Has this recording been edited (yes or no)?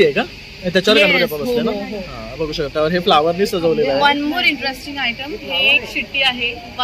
no